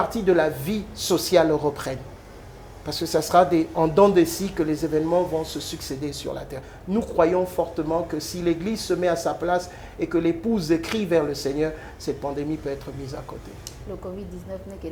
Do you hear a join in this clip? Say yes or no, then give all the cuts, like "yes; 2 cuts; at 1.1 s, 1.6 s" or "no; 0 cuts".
no; 0 cuts